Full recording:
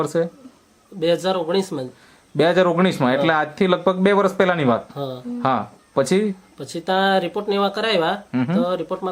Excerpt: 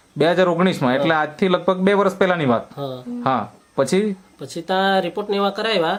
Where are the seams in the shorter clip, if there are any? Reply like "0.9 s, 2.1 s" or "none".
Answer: none

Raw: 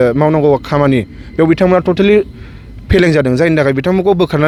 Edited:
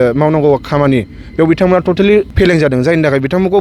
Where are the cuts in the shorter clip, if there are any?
2.3 s

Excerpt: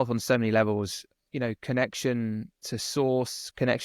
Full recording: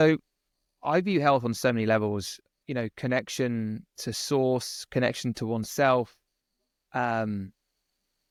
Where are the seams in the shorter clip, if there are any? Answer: none

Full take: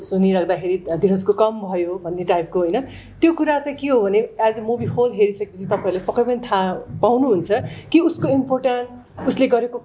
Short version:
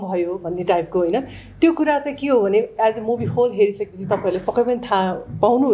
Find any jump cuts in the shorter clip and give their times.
none

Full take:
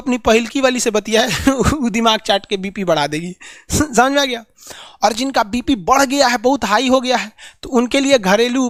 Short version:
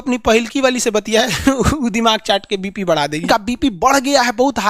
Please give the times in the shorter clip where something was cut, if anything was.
3.2 s

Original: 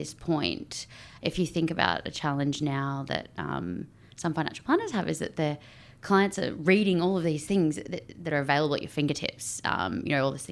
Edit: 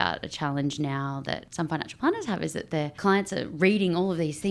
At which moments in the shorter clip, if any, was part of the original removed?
1.5 s, 2.9 s

